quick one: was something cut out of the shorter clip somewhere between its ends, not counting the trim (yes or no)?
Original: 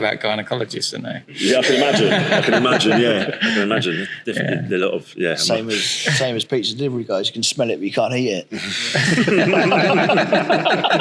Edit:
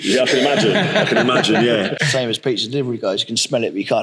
yes